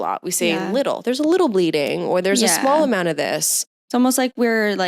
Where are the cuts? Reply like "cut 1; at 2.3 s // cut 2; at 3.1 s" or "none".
cut 1; at 3.8 s